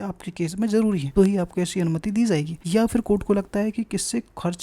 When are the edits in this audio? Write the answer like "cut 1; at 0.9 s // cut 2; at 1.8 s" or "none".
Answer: cut 1; at 1.1 s // cut 2; at 2.6 s